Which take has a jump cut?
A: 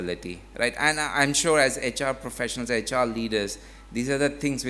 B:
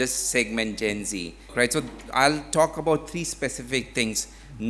B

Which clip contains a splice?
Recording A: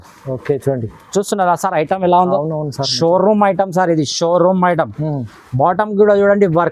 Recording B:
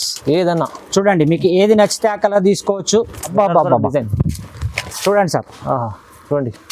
B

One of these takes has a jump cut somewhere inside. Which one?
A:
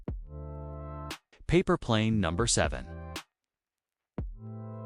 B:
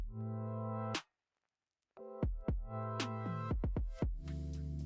A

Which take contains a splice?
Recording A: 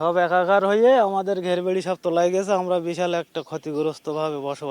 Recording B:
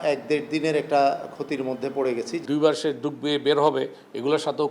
B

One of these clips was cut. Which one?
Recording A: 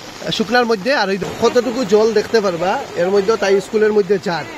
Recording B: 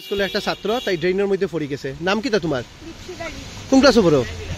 A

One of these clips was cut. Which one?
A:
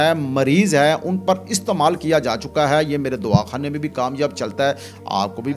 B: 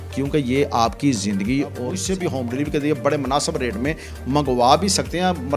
B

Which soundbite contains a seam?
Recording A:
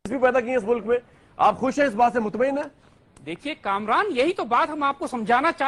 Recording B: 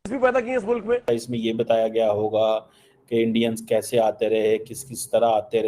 B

